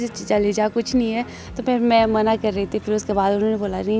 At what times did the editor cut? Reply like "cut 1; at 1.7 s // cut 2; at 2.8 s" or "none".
none